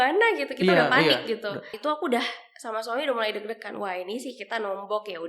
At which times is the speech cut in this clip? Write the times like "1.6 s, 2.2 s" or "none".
1.7 s